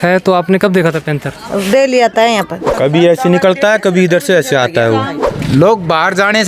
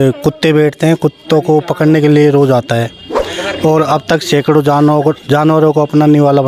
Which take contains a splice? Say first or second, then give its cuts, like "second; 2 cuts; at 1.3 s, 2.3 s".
first; 2 cuts; at 2.6 s, 5.2 s